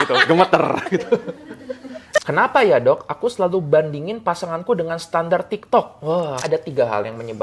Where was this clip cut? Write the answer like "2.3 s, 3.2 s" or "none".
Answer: 2.2 s, 6.4 s